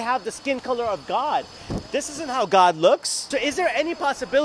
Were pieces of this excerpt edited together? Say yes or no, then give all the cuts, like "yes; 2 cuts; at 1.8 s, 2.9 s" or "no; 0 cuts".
yes; 1 cut; at 3.2 s